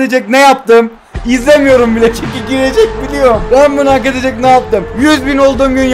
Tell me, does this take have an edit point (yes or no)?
yes